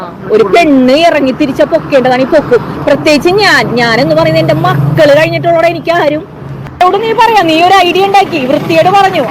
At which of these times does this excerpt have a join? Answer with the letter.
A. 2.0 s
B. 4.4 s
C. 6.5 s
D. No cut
C